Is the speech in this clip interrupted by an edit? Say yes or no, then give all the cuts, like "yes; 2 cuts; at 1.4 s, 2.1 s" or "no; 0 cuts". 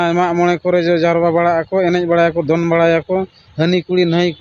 no; 0 cuts